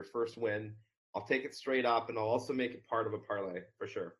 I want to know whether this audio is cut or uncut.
uncut